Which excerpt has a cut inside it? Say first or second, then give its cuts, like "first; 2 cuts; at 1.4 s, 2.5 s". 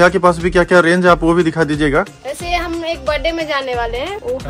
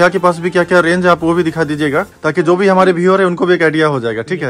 first; 1 cut; at 2.1 s